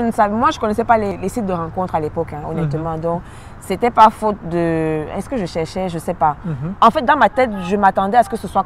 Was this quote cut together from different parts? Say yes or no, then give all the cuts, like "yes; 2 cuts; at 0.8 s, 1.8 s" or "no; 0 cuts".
yes; 2 cuts; at 1.1 s, 6.6 s